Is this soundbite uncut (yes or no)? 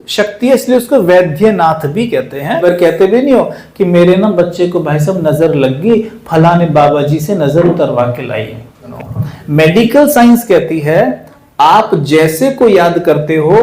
no